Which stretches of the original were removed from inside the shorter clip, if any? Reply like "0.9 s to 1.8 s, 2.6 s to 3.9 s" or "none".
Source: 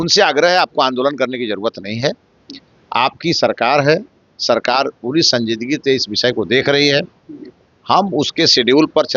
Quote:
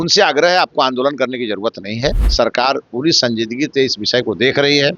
2.2 s to 4.3 s